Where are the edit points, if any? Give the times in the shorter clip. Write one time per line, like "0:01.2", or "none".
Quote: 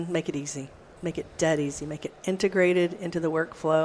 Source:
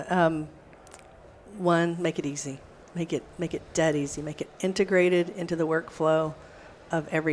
0:00.9

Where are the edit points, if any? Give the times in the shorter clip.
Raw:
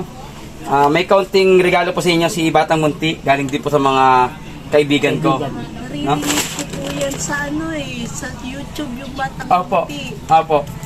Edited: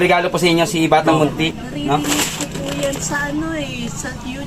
0:01.5

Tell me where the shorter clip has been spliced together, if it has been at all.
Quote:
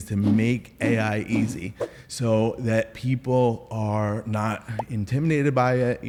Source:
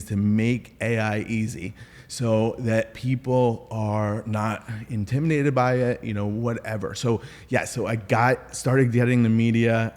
none

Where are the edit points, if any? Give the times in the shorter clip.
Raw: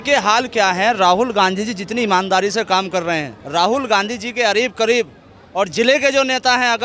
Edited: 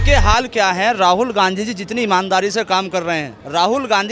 none

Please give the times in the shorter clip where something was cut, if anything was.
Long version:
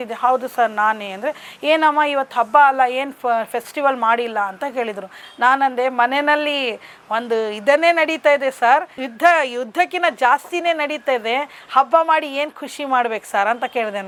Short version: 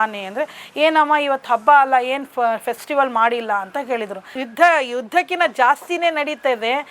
0:04.4

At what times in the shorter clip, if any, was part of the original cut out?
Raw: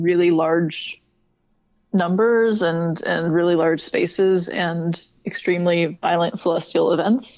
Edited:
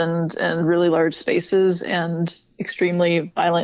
none

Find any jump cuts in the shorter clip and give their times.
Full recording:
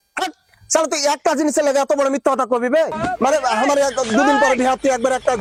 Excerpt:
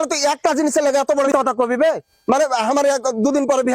0:01.3

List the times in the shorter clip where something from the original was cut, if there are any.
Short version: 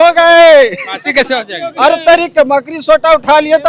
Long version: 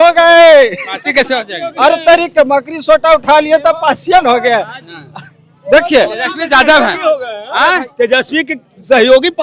none

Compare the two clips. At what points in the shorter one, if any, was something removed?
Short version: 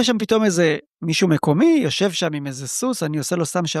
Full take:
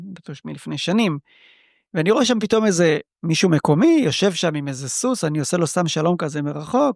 none

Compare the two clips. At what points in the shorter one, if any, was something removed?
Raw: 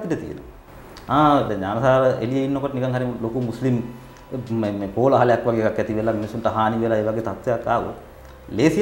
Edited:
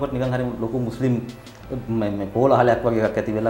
none

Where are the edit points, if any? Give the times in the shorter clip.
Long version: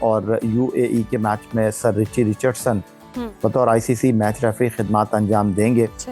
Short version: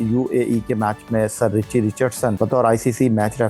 0:02.3

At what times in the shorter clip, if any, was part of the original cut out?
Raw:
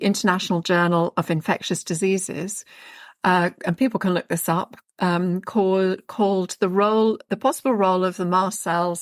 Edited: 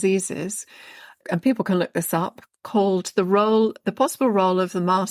0:01.2
0:02.6

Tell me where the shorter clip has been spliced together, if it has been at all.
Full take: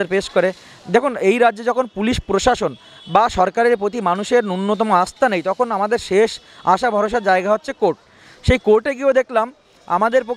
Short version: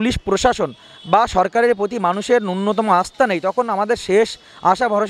none

